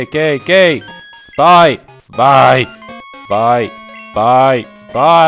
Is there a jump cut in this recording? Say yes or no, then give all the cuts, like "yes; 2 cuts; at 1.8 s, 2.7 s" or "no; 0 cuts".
no; 0 cuts